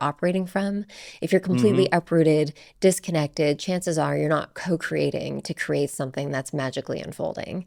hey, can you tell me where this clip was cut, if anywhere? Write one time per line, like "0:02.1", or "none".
none